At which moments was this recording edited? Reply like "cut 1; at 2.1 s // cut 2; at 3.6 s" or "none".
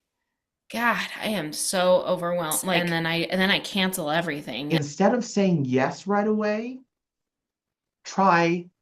cut 1; at 2.8 s // cut 2; at 4.5 s